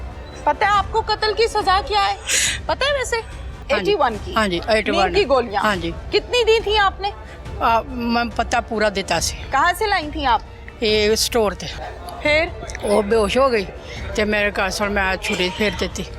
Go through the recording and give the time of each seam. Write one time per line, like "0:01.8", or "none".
0:03.6
0:11.7